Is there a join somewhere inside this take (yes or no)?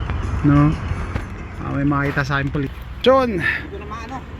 yes